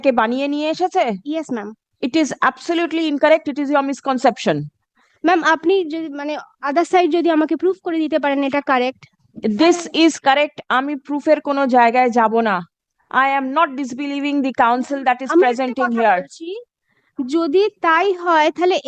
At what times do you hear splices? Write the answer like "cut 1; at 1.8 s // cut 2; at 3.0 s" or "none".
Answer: none